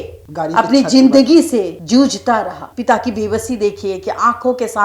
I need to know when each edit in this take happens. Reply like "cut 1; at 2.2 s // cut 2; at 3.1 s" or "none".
cut 1; at 2.7 s